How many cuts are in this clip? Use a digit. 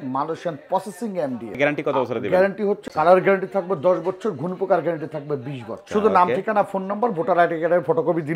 3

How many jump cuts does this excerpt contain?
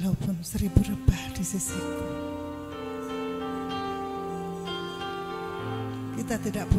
0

